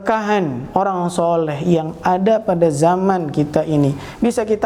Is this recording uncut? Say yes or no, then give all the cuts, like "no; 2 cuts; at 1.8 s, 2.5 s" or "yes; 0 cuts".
yes; 0 cuts